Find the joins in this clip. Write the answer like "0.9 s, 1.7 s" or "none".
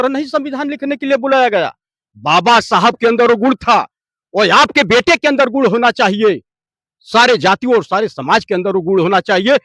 none